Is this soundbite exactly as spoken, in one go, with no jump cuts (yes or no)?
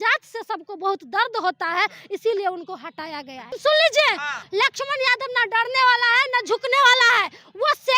no